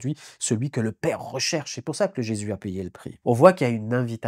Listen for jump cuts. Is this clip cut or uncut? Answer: cut